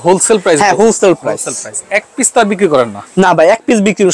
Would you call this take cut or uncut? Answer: uncut